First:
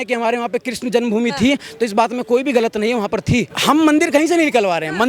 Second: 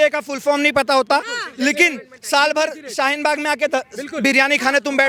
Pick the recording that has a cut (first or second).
first